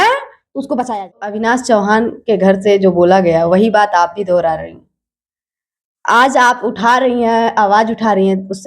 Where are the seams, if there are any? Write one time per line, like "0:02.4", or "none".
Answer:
0:01.3